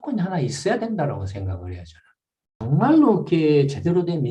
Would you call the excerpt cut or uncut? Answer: cut